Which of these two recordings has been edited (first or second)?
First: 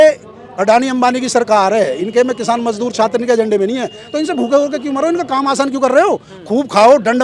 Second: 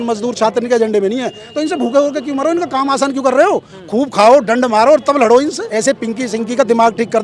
second